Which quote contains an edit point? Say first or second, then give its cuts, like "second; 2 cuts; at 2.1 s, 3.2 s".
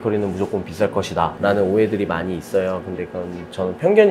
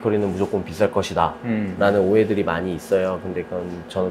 first; 1 cut; at 1.3 s